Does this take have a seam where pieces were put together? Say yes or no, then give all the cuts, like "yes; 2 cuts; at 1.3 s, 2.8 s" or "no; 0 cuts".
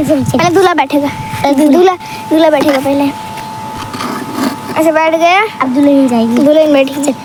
no; 0 cuts